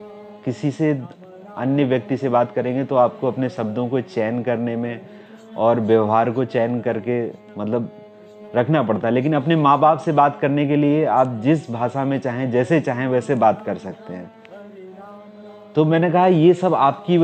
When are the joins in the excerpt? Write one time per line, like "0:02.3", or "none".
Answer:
none

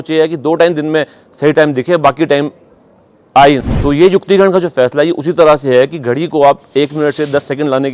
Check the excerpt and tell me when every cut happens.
0:03.7

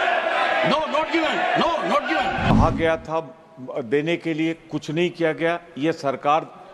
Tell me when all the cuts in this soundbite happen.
0:02.5

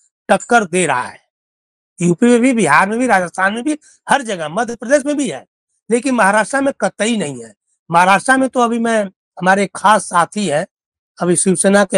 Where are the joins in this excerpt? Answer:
none

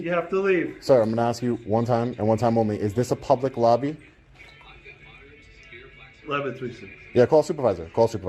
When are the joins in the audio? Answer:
none

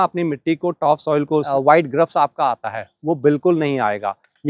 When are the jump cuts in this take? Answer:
0:01.5

